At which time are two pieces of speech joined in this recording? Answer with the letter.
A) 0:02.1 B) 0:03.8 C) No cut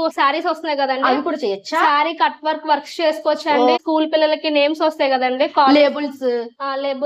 B